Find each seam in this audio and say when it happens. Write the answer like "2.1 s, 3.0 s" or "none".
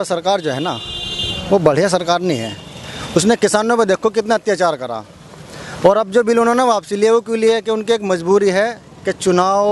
none